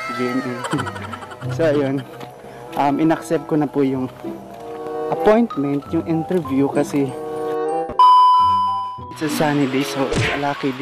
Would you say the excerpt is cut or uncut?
cut